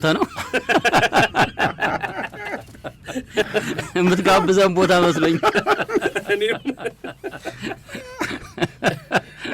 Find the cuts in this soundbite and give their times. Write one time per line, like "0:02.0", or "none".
none